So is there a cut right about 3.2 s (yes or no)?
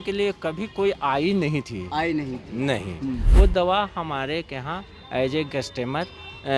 yes